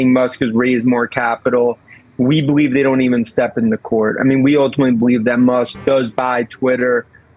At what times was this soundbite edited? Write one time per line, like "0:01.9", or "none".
none